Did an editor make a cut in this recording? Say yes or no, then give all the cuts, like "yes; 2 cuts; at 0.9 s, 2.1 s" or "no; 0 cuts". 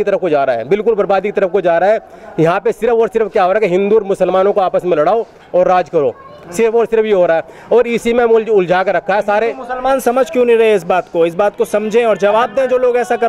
no; 0 cuts